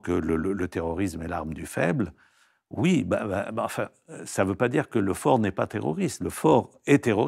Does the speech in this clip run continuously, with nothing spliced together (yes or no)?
yes